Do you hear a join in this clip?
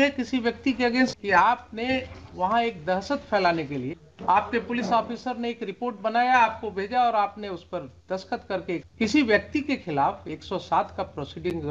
yes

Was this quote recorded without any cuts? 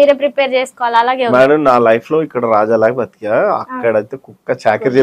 yes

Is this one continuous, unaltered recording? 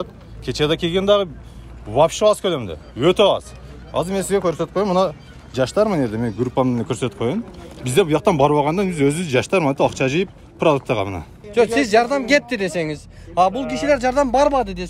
no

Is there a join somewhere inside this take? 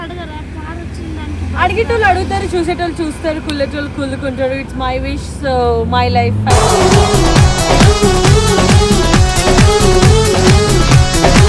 no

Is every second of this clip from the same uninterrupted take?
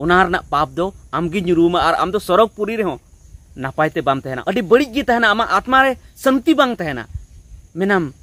no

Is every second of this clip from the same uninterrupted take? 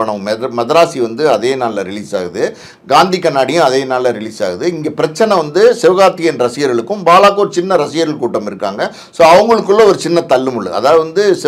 yes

